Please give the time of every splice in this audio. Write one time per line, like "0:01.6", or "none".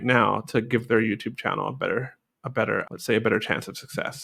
none